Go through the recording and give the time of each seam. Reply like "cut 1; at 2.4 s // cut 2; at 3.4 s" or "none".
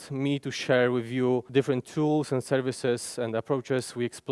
cut 1; at 1.5 s